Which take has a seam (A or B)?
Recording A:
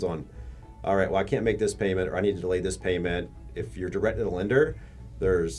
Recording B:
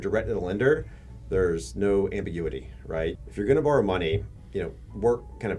B